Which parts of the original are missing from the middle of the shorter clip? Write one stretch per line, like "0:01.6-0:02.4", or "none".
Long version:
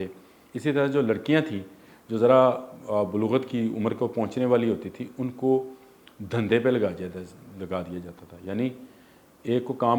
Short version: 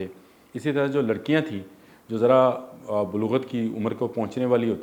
none